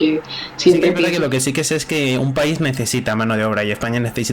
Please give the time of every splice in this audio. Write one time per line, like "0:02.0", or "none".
0:01.1